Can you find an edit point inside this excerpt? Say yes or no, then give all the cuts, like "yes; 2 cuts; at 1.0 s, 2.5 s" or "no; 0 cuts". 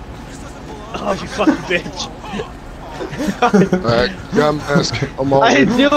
no; 0 cuts